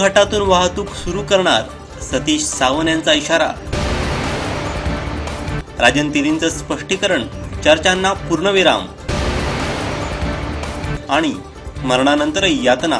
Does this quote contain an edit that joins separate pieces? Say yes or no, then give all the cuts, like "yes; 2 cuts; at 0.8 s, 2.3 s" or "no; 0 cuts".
no; 0 cuts